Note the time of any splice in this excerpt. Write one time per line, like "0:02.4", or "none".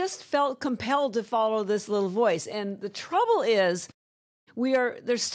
none

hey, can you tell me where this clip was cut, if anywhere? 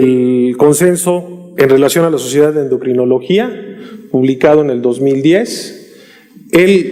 none

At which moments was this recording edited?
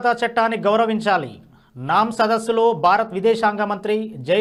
none

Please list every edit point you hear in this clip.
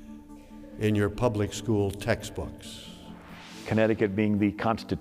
0:03.5

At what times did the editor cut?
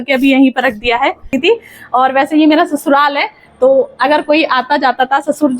0:01.3

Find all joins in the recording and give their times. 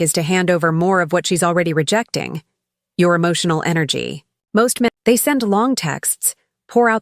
0:04.9

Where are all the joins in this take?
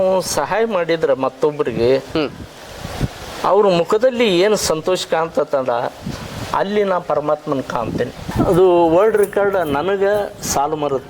0:08.2

